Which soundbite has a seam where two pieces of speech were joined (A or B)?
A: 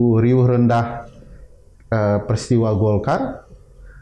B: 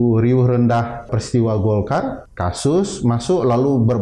B